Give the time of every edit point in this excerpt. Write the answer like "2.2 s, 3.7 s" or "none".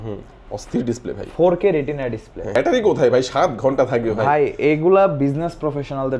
2.6 s